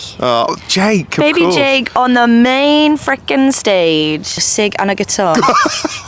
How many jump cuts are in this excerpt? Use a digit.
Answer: 1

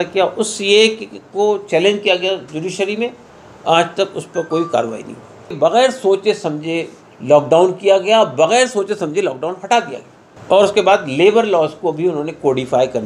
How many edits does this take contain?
0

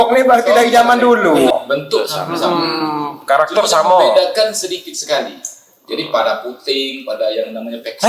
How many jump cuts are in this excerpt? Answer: 1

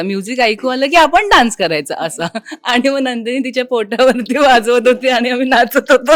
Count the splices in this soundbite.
0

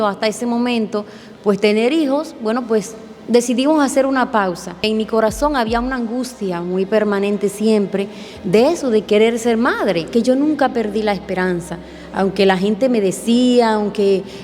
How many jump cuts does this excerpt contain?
2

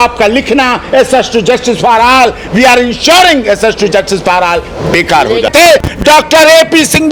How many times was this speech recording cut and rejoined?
1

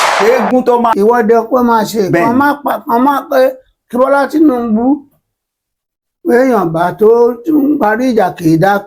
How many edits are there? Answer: 1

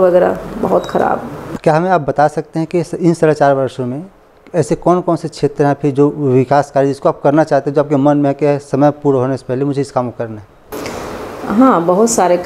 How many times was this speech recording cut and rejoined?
1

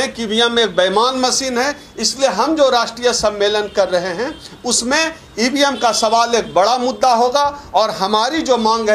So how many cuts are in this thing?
0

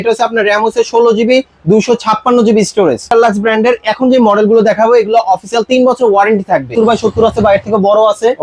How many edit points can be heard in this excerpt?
2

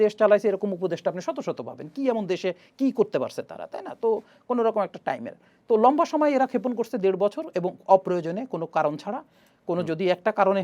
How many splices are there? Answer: 0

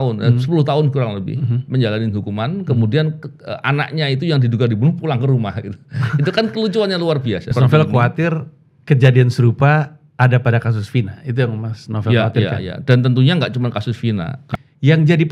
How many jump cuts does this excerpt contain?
2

